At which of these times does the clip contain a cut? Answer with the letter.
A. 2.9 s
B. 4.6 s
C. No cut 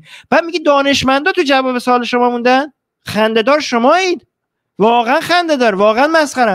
C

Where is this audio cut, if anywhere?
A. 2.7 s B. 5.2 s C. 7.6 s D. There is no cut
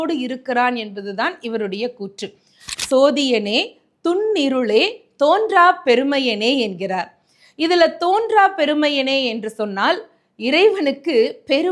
A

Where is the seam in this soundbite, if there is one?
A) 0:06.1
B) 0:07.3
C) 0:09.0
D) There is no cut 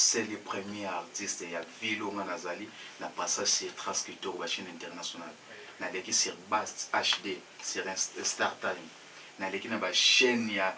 D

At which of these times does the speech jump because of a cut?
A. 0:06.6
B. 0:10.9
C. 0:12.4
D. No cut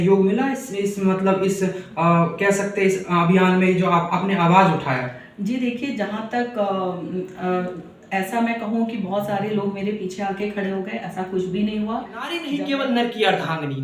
C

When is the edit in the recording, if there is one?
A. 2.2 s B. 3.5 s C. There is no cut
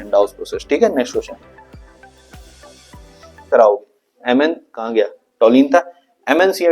B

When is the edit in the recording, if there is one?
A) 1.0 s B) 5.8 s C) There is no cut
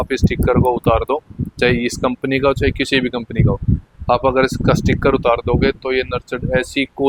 C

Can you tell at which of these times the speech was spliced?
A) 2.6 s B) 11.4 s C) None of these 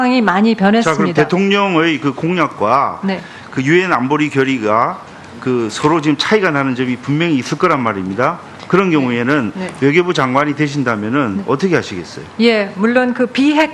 A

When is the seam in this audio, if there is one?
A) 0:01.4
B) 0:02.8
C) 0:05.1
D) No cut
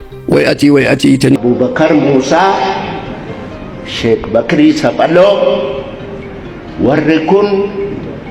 A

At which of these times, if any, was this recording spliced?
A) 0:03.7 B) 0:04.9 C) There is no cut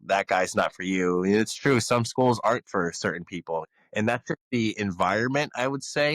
A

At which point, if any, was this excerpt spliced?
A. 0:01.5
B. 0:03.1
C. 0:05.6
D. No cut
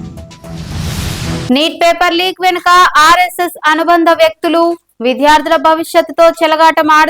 A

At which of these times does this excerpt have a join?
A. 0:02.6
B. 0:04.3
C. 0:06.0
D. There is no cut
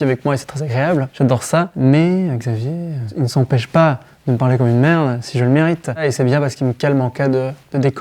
C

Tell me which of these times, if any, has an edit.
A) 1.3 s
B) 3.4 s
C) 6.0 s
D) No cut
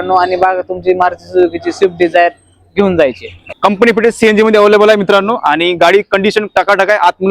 B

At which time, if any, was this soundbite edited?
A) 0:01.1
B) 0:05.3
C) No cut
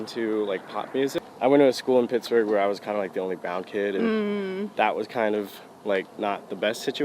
A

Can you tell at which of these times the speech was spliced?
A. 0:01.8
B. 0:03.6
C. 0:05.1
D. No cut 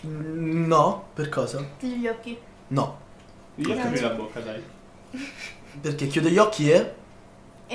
D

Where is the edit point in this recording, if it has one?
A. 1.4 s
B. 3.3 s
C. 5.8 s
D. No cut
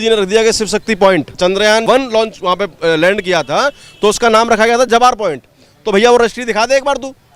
A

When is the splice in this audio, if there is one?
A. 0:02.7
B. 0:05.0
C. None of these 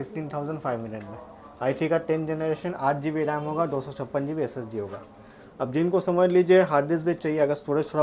C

